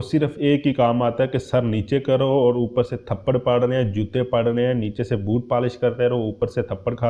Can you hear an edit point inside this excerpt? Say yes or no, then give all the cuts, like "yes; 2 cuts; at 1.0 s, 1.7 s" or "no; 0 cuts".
no; 0 cuts